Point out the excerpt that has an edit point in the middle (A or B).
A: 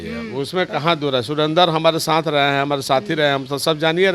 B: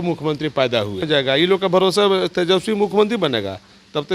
B